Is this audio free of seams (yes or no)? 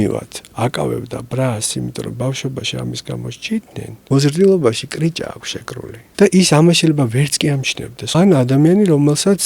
no